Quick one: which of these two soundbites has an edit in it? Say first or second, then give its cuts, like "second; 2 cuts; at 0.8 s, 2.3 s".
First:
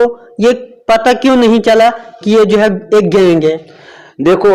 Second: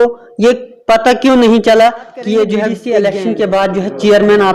second; 1 cut; at 2.7 s